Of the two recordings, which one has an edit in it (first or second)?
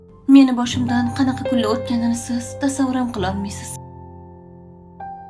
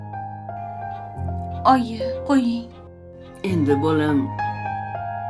second